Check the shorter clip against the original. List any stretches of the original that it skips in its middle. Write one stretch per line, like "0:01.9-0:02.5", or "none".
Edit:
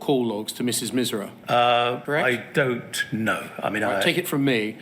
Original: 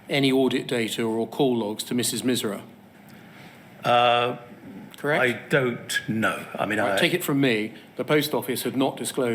0:02.7-0:03.7
0:04.4-0:05.0